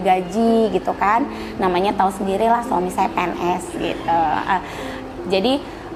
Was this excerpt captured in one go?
yes; 0 cuts

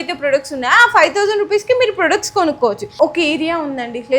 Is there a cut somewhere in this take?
yes; 1 cut; at 2.9 s

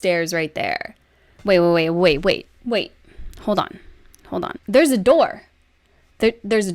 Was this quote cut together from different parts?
yes; 1 cut; at 4.6 s

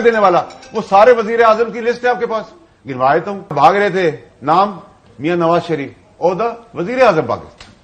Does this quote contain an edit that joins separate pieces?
yes; 1 cut; at 3.5 s

